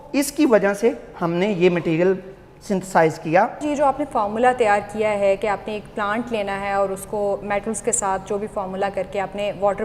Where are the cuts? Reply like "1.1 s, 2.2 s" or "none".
3.7 s

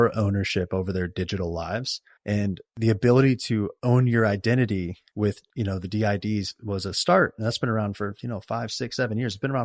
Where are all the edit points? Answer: none

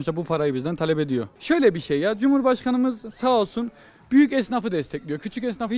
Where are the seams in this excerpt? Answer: 1.3 s

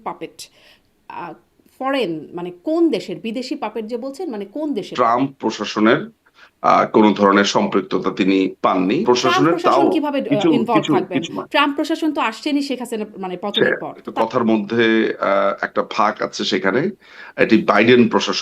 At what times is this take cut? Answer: 4.9 s, 9.0 s, 14.0 s

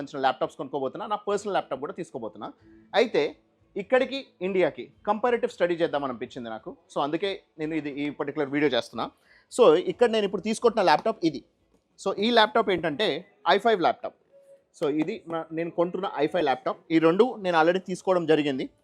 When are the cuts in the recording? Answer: none

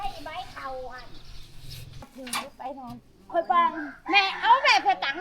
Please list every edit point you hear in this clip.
2.1 s

